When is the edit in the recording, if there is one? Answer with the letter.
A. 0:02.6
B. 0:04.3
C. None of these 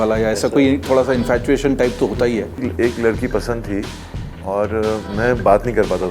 A